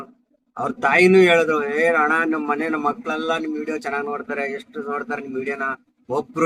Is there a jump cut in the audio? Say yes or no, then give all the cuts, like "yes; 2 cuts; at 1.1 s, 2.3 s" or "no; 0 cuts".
no; 0 cuts